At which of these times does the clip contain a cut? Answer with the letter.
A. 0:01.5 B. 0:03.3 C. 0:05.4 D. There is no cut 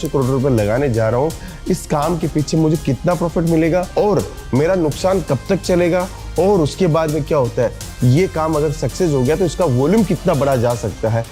D